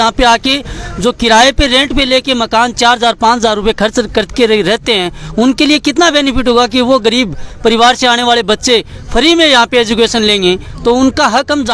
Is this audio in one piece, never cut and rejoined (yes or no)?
yes